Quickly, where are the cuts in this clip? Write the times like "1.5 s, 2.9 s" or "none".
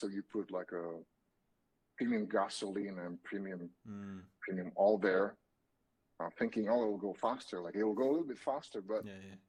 none